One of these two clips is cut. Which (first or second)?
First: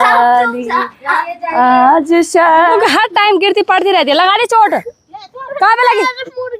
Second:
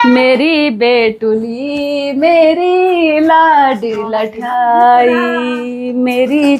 first